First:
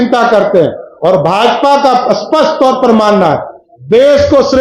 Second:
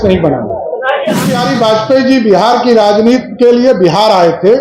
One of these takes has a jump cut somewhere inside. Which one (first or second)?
second